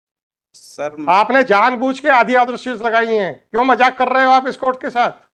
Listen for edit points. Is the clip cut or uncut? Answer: uncut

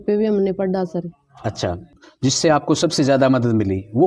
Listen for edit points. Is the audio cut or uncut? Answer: uncut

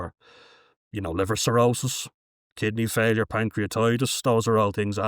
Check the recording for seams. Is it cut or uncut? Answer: uncut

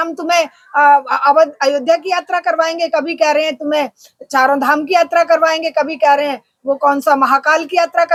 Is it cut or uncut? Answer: uncut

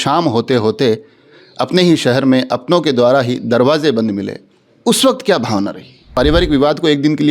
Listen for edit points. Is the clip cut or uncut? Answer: cut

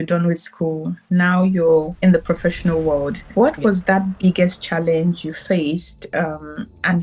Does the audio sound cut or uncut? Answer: cut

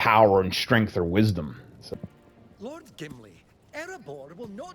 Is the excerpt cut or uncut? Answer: cut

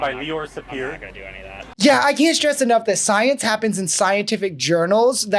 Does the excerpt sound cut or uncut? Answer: cut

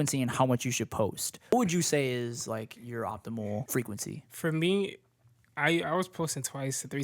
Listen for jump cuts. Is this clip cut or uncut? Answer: cut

